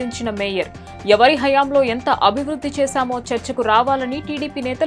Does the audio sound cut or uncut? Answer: uncut